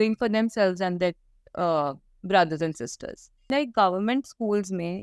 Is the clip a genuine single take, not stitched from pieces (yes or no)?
no